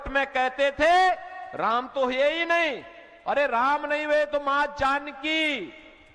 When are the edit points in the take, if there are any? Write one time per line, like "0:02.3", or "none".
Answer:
none